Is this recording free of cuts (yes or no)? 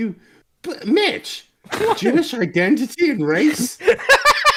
yes